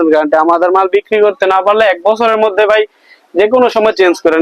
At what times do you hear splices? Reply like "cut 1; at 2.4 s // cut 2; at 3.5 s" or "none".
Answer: none